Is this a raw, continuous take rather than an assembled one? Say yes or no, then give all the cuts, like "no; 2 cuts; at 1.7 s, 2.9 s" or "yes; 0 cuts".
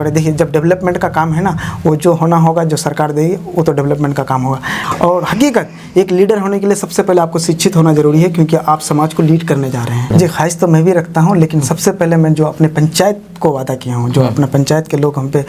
no; 2 cuts; at 4.7 s, 10.1 s